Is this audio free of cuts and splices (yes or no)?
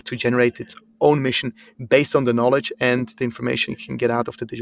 yes